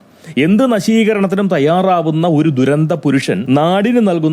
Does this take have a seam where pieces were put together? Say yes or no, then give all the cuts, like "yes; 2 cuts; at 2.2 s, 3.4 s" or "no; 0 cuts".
yes; 1 cut; at 3.4 s